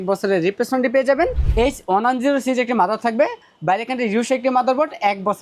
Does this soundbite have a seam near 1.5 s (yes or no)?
yes